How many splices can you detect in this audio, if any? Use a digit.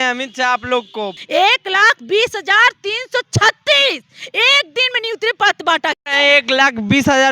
1